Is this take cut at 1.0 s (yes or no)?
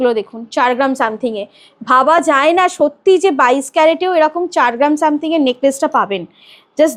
no